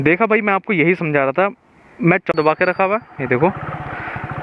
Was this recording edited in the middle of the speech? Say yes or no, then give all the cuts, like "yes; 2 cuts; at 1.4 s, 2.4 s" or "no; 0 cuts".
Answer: yes; 1 cut; at 2.3 s